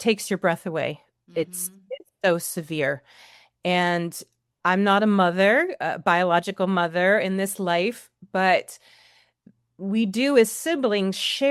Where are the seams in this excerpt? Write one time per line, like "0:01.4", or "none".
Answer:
none